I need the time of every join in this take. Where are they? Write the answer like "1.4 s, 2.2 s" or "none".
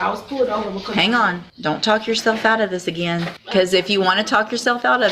1.5 s, 3.4 s